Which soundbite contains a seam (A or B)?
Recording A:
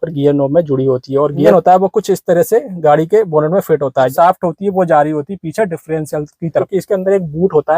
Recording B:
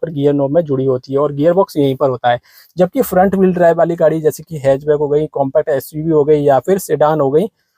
A